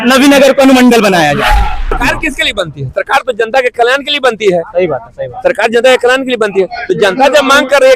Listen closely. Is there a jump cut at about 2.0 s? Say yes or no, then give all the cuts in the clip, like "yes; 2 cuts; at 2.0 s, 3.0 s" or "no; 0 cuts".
yes; 1 cut; at 2.0 s